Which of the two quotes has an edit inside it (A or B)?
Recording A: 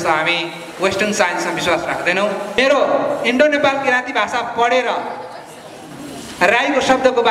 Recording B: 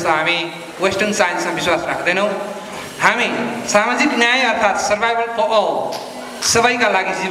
A